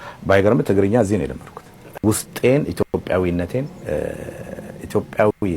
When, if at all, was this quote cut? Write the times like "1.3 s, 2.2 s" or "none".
1.9 s